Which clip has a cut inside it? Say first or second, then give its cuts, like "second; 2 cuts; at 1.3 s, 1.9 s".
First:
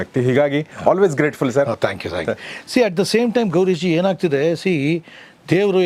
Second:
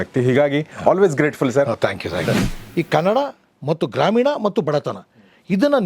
second; 1 cut; at 2.5 s